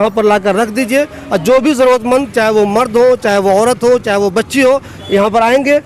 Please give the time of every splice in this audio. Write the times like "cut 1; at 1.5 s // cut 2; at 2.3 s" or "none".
none